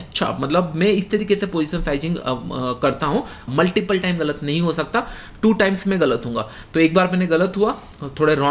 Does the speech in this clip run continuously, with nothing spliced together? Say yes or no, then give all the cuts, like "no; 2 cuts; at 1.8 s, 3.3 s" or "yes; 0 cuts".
no; 1 cut; at 3.4 s